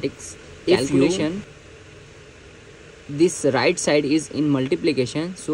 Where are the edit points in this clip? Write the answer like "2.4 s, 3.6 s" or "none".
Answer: 1.2 s